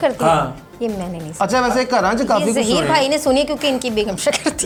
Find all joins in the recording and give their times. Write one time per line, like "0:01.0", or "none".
none